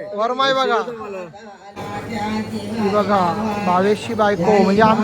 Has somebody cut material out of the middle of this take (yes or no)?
yes